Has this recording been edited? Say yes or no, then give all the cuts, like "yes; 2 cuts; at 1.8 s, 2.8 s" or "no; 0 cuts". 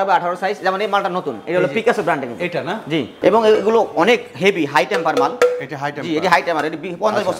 yes; 1 cut; at 3.1 s